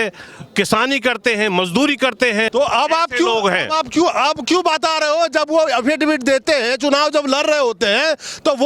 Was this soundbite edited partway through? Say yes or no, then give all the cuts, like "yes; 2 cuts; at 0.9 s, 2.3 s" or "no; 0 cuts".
yes; 1 cut; at 2.5 s